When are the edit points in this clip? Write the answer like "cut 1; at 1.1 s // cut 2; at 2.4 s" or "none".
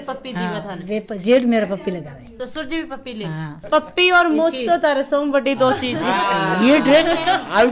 cut 1; at 2.3 s // cut 2; at 3.5 s